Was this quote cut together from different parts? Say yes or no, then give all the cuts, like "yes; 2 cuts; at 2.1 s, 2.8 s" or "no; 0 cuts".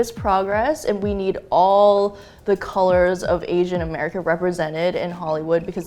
no; 0 cuts